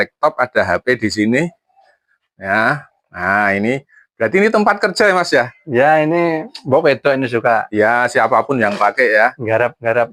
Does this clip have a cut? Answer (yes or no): no